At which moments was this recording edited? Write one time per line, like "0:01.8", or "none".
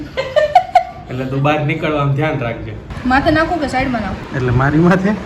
0:02.8

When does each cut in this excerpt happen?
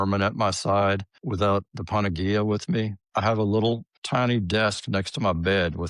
0:01.2
0:03.0
0:03.9

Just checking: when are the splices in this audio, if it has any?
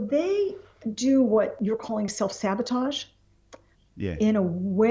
none

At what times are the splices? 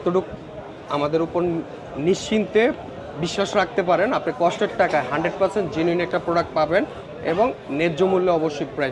none

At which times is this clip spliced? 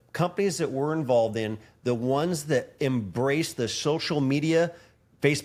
none

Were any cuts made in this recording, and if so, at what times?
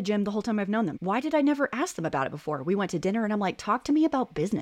0:01.0

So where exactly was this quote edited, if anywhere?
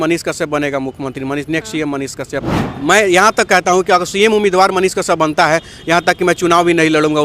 0:02.6

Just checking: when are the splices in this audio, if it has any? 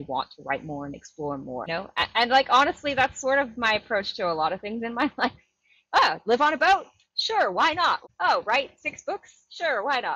0:01.7
0:08.0

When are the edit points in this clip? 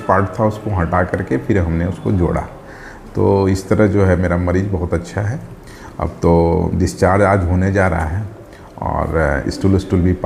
none

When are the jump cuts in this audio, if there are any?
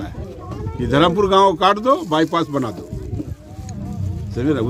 none

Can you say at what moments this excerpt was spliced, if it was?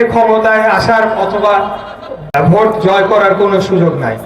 0:02.3

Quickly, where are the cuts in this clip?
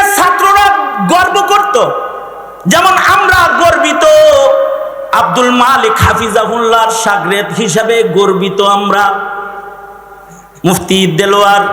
none

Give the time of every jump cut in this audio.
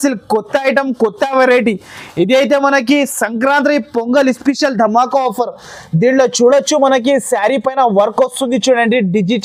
none

